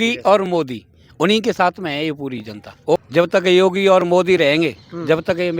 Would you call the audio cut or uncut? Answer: cut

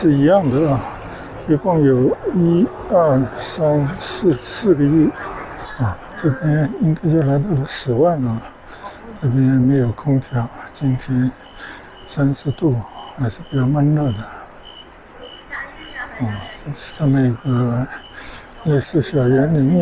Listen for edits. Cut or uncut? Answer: cut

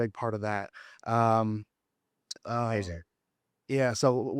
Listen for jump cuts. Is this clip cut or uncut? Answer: uncut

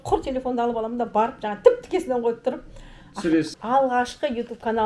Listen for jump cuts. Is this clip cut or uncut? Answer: cut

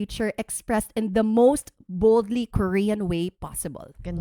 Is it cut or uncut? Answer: uncut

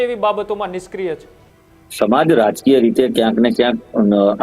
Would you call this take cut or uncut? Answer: uncut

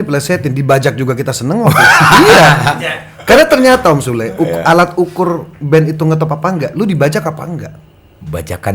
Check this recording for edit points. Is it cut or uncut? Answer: uncut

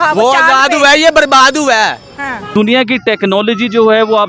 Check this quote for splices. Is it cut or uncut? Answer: cut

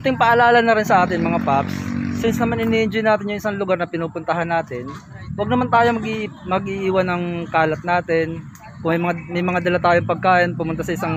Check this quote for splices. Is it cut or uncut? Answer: cut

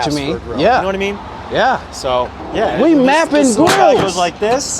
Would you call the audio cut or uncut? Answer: cut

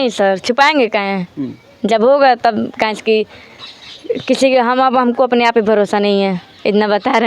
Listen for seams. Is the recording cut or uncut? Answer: uncut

